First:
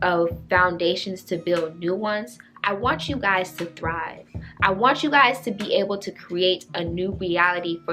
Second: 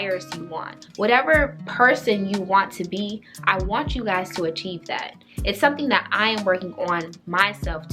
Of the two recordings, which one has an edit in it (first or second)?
second